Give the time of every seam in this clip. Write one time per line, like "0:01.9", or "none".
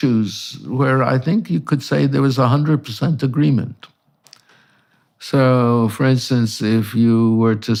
none